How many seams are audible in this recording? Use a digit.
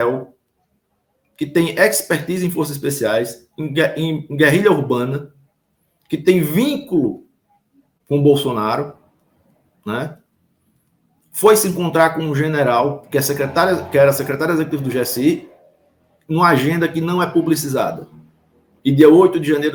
0